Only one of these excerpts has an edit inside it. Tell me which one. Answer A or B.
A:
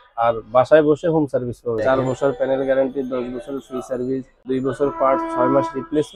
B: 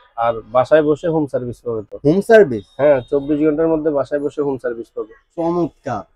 A